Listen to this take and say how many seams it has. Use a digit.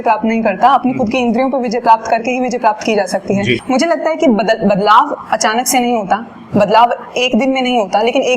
1